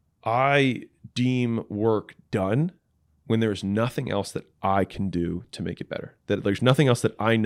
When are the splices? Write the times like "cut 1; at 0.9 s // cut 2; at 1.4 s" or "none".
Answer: none